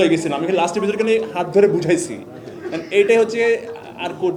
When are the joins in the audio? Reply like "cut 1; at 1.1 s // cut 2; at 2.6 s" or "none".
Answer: none